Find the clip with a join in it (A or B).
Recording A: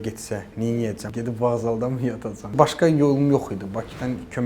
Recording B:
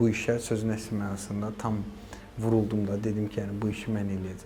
A